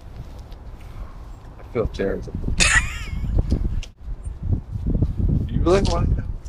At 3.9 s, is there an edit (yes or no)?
yes